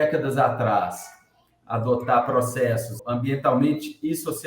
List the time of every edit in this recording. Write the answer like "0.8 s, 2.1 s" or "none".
2.9 s

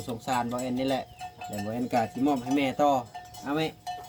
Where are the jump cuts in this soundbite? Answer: none

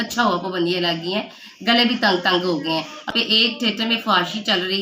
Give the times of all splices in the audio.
3.1 s

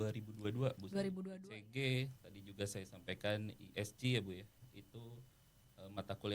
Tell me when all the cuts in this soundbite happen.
1.2 s

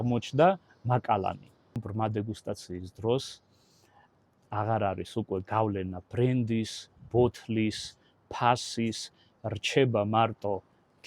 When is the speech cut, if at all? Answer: 1.9 s

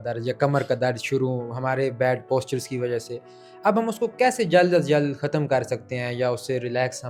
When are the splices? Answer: none

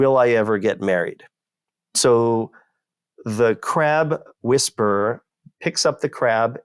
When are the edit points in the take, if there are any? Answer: 5.7 s

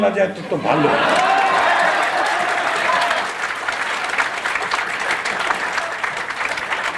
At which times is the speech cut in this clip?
none

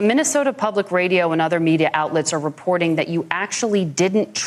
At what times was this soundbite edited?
none

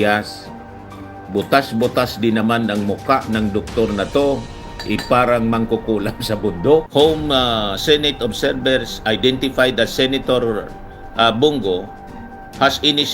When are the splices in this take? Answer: 6.9 s

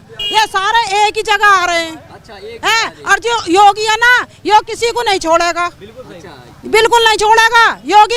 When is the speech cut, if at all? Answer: none

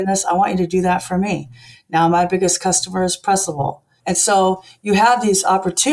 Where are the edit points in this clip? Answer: 4.0 s

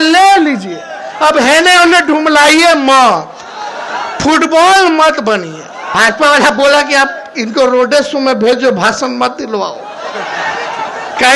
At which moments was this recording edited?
5.8 s

